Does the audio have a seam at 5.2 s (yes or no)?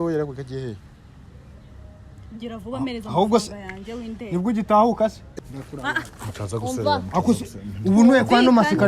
yes